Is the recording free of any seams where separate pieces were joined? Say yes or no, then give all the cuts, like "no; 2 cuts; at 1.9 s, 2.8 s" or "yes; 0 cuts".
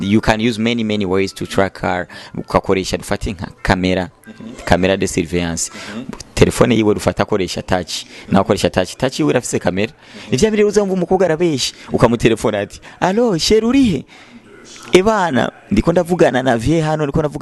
yes; 0 cuts